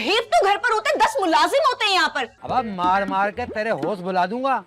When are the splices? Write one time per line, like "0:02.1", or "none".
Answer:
0:02.3